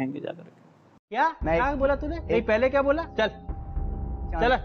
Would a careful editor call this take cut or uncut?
uncut